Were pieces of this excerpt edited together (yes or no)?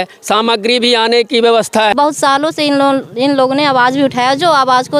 yes